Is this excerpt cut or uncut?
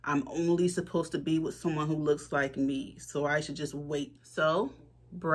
cut